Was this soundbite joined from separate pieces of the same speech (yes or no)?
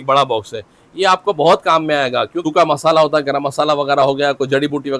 yes